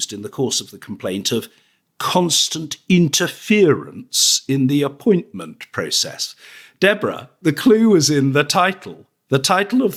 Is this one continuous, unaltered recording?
yes; 0 cuts

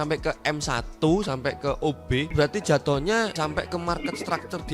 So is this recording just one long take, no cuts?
no; 2 cuts; at 2.3 s, 3.4 s

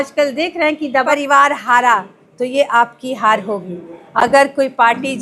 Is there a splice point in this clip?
yes; 1 cut; at 1.1 s

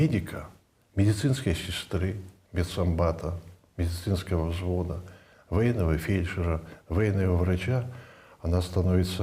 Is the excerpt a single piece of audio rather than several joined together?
yes; 0 cuts

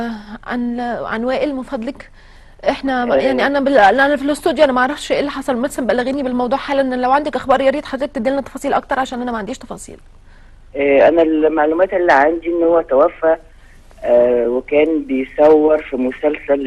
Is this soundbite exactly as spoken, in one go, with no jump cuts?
no; 1 cut; at 14.1 s

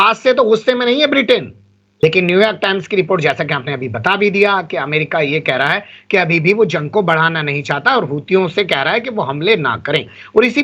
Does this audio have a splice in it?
yes; 1 cut; at 1.8 s

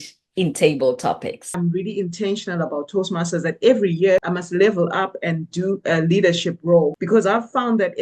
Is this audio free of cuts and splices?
no; 3 cuts; at 1.5 s, 4.3 s, 7.0 s

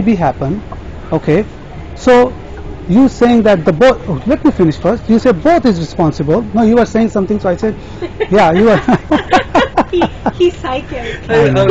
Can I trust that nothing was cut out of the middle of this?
yes; 0 cuts

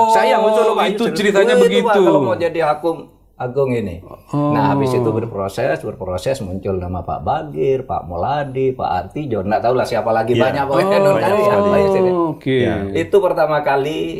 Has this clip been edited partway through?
no; 0 cuts

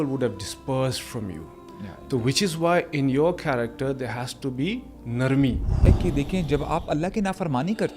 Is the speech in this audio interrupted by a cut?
yes; 1 cut; at 5.9 s

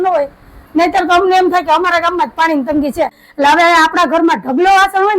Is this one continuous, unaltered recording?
no; 1 cut; at 3.2 s

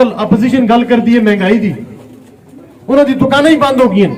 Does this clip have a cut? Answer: no; 0 cuts

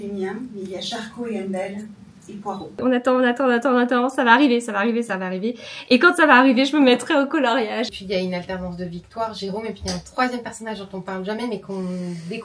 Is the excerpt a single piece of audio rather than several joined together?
no; 2 cuts; at 2.8 s, 7.9 s

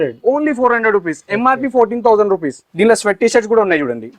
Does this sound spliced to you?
yes; 1 cut; at 2.6 s

